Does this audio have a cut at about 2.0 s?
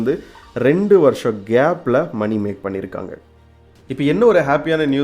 no; 1 cut; at 3.2 s

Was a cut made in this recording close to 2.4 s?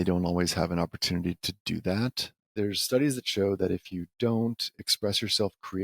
yes; 1 cut; at 2.4 s

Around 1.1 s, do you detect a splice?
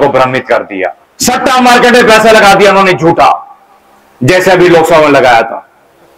yes; 1 cut; at 1.1 s

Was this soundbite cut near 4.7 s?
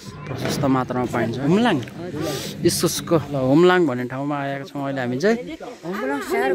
no; 3 cuts; at 1.4 s, 2.5 s, 3.3 s

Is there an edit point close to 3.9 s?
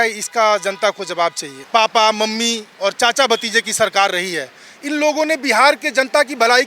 no; 1 cut; at 1.5 s

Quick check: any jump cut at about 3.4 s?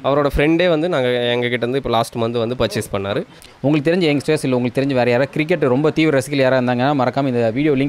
yes; 1 cut; at 3.4 s

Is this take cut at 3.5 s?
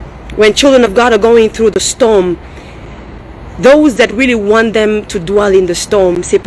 no; 0 cuts

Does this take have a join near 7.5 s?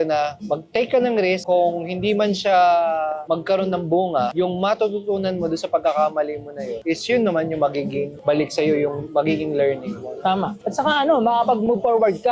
no; 0 cuts

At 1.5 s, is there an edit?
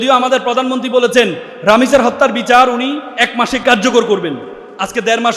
yes; 2 cuts; at 1.5 s, 3.6 s

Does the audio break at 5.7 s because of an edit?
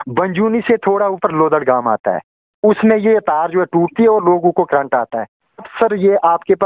yes; 1 cut; at 5.7 s

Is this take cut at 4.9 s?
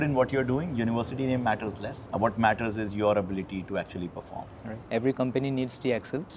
yes; 1 cut; at 4.9 s

